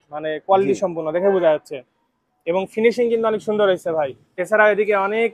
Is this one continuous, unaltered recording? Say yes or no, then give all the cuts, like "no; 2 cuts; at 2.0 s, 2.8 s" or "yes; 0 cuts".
no; 1 cut; at 4.3 s